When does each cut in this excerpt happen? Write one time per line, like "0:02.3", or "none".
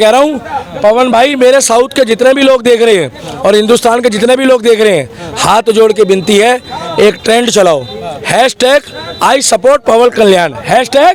none